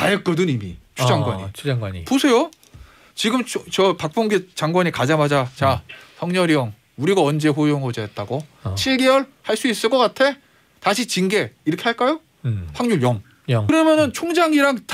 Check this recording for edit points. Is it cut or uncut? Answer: cut